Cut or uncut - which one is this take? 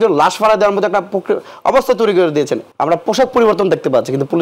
cut